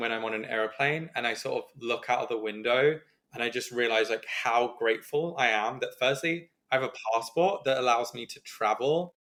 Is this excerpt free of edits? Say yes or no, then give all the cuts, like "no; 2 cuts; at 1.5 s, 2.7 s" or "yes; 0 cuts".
yes; 0 cuts